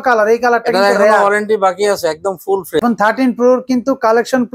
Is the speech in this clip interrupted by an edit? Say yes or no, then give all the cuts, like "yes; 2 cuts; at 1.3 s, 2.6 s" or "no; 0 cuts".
yes; 1 cut; at 2.8 s